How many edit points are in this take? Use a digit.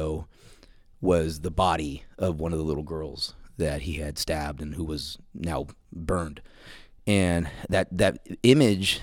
1